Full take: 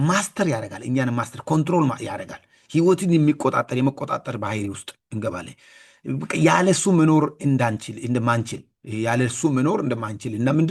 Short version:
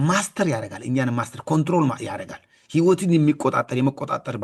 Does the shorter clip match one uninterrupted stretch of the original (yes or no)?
yes